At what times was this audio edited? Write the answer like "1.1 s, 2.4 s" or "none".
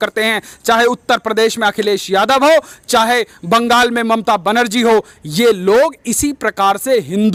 none